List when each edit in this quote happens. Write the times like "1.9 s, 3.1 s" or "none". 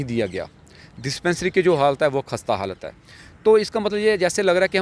none

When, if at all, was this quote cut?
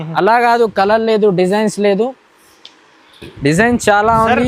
3.2 s

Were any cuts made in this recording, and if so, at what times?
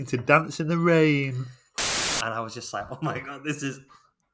2.1 s

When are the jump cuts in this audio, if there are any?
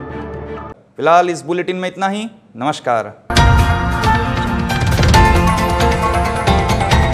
none

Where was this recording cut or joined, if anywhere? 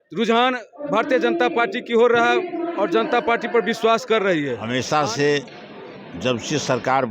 4.6 s

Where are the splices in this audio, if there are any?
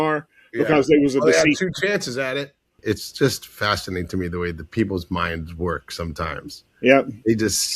2.7 s

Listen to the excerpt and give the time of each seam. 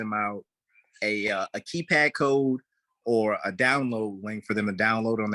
none

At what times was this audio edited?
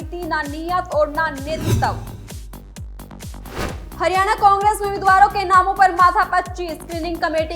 2.0 s, 3.4 s

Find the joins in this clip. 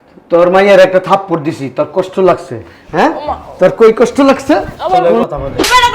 5.0 s

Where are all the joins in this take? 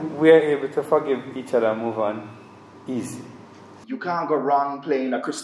3.7 s

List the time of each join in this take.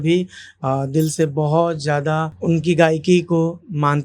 2.3 s

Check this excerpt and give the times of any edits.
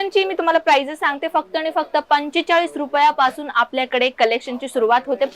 none

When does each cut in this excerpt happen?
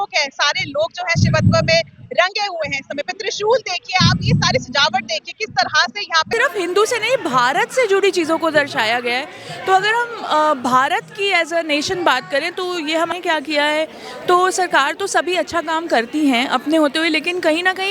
6.3 s, 13.1 s

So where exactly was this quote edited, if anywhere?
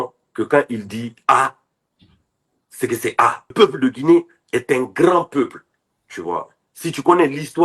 3.5 s

